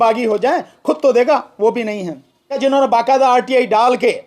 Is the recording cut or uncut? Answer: cut